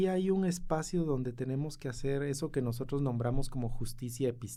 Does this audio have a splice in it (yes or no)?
no